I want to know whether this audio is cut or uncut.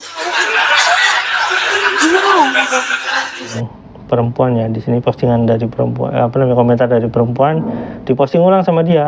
cut